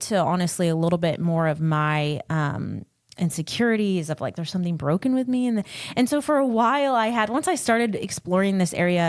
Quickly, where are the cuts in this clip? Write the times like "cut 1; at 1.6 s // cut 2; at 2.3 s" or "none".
none